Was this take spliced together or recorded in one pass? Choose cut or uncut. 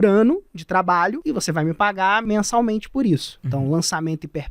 cut